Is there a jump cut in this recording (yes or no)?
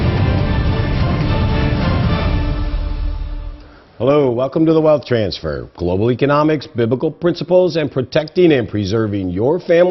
no